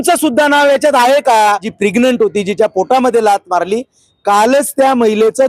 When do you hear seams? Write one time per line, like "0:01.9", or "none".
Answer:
0:01.7

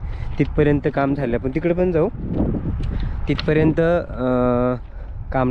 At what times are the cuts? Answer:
none

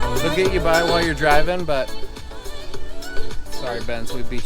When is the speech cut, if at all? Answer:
0:03.5

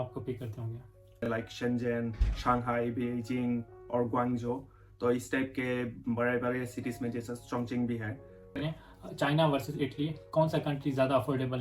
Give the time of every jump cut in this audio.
0:01.3
0:08.5

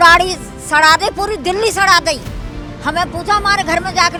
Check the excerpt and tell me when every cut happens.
none

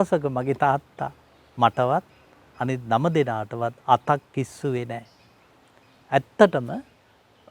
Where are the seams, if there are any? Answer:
none

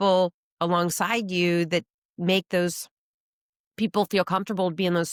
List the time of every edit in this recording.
none

